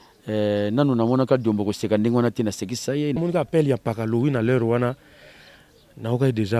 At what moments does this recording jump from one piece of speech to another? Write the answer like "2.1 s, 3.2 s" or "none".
3.2 s